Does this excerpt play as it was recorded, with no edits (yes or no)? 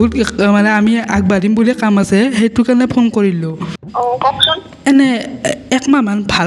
no